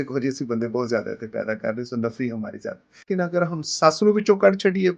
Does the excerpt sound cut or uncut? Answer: cut